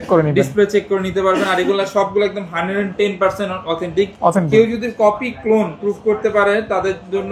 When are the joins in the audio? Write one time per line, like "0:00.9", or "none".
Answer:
none